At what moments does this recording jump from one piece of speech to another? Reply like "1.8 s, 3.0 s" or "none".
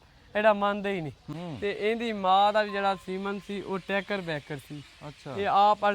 1.3 s